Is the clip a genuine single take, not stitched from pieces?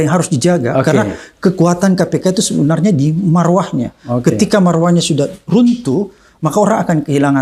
yes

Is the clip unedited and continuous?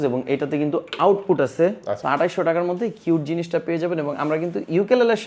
no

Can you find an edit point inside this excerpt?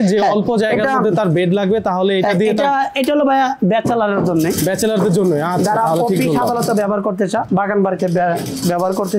no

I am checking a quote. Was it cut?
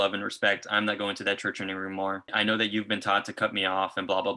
yes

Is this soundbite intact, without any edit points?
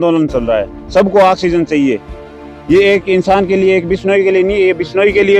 yes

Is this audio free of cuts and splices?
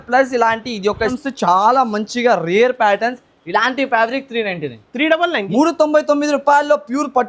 no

